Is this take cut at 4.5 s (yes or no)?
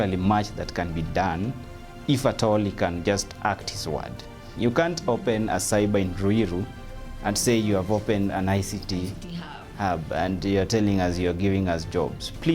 yes